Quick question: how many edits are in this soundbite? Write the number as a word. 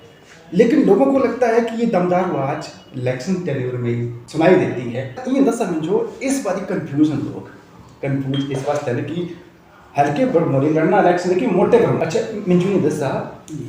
two